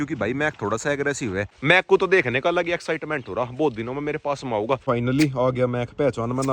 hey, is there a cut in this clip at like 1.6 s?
yes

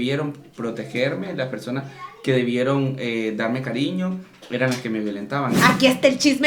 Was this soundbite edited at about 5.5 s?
yes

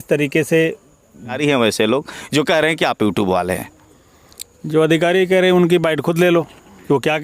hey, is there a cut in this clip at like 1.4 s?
yes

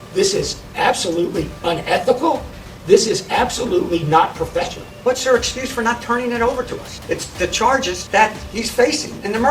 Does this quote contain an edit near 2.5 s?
no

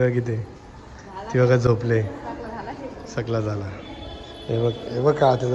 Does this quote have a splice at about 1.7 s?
no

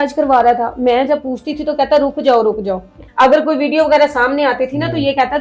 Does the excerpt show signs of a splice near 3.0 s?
yes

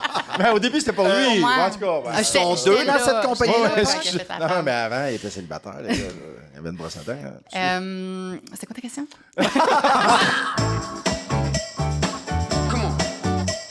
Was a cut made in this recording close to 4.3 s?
no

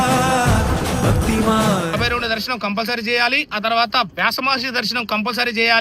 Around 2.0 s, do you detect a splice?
yes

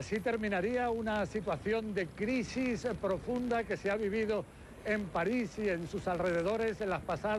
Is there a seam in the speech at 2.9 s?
yes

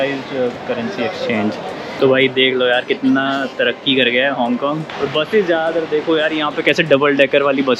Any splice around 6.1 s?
no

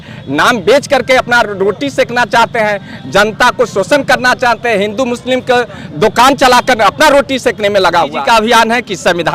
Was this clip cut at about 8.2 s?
yes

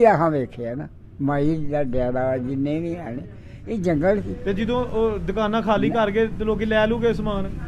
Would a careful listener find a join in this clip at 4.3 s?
yes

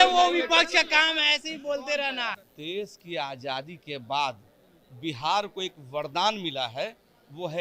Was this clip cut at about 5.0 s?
no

